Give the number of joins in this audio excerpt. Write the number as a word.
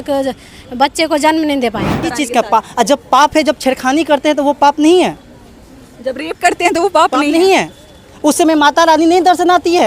one